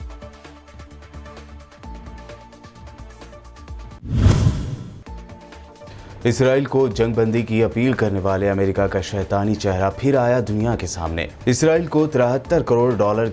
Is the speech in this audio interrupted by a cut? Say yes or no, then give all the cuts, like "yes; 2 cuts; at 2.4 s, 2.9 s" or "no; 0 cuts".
yes; 1 cut; at 1.9 s